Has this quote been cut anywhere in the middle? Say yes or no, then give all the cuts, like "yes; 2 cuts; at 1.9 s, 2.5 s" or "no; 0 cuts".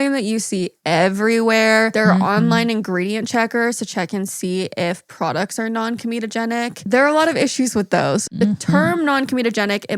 yes; 2 cuts; at 6.8 s, 8.3 s